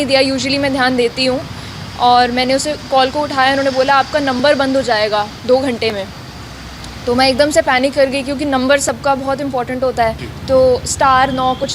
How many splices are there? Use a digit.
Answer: 1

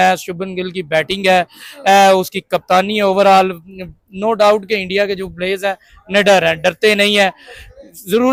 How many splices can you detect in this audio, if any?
0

